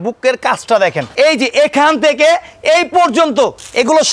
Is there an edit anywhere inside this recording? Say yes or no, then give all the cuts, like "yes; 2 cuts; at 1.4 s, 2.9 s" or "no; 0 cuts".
yes; 1 cut; at 1.0 s